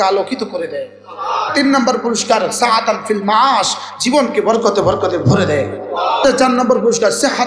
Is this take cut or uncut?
cut